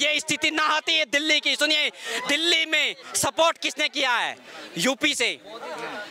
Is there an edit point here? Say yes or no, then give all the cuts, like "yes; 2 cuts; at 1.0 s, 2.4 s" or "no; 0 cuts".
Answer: no; 0 cuts